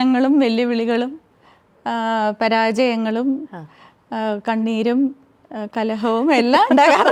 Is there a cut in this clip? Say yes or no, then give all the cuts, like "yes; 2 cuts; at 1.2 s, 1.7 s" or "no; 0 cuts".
no; 0 cuts